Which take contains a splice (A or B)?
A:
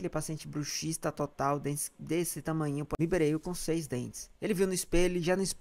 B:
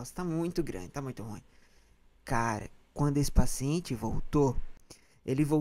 A